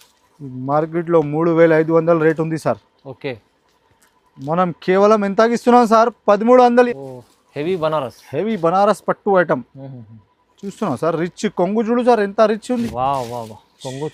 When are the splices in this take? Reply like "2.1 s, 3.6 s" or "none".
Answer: 6.9 s